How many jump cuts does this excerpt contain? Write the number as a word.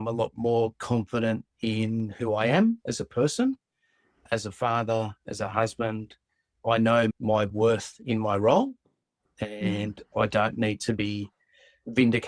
zero